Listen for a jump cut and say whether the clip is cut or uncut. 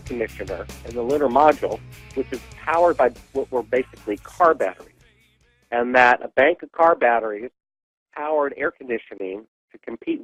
uncut